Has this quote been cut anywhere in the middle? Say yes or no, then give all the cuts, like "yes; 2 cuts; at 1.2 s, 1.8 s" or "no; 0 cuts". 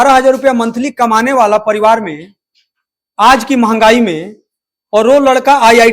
no; 0 cuts